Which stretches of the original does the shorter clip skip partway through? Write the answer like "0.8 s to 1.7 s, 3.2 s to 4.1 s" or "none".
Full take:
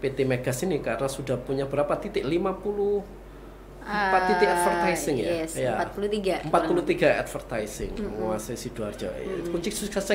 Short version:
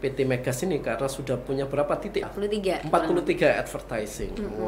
2.3 s to 5.9 s